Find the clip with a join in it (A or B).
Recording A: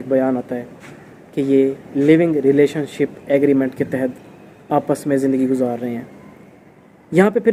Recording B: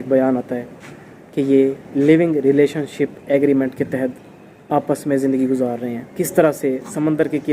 B